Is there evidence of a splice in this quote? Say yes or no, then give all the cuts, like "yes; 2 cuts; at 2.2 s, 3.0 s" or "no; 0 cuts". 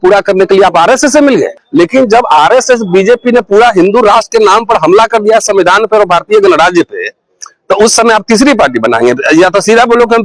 yes; 1 cut; at 1.6 s